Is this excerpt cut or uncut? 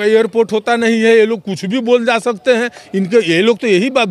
uncut